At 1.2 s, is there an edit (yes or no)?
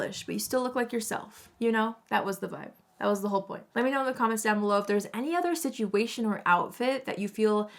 no